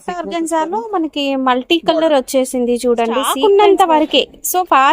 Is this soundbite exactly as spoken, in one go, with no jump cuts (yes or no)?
no